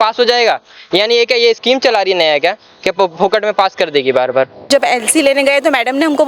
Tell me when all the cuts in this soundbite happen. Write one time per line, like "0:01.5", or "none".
0:04.7